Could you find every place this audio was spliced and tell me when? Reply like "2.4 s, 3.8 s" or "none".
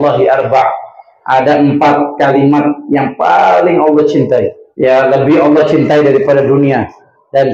4.6 s